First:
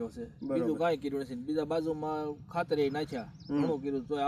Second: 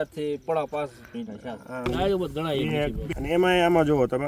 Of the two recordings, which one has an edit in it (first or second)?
second